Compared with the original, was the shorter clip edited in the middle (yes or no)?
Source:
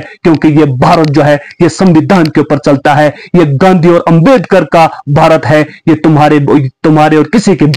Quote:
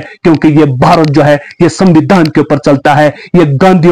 no